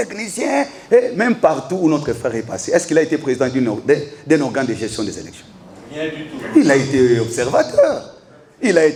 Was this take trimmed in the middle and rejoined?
no; 0 cuts

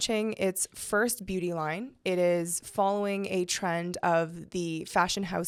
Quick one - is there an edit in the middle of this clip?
no; 0 cuts

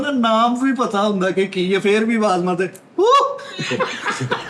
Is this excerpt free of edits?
yes; 0 cuts

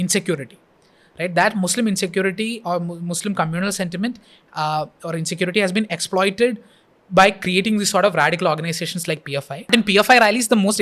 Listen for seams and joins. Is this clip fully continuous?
no; 1 cut; at 9.7 s

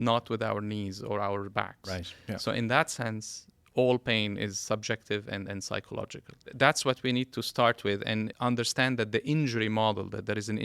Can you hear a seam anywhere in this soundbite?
yes; 2 cuts; at 6.5 s, 8.3 s

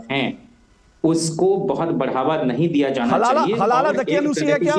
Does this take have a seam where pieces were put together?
no; 0 cuts

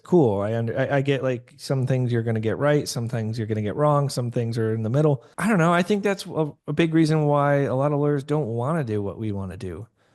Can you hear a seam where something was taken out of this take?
yes; 1 cut; at 5.3 s

